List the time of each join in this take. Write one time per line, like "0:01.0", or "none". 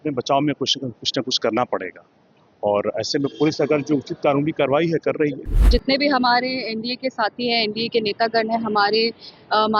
0:05.5